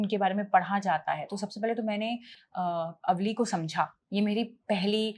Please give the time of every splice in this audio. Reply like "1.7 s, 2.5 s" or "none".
none